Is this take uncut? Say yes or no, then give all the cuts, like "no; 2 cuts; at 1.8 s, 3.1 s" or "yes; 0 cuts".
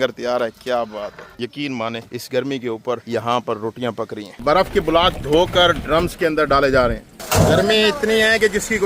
no; 3 cuts; at 1.3 s, 4.3 s, 7.1 s